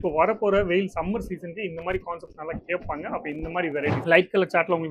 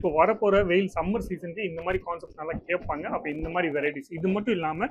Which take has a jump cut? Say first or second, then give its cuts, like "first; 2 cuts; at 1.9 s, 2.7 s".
first; 1 cut; at 4.0 s